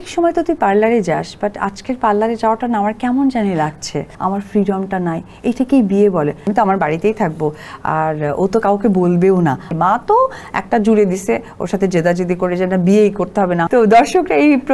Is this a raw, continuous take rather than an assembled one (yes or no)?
no